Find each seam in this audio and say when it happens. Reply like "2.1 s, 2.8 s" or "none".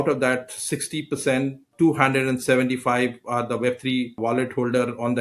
4.2 s